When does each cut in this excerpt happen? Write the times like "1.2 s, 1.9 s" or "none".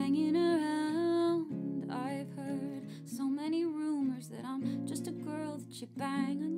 none